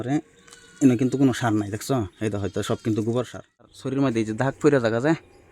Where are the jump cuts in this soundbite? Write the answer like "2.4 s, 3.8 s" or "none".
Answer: 3.8 s